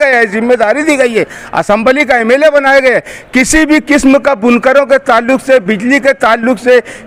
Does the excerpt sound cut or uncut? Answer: uncut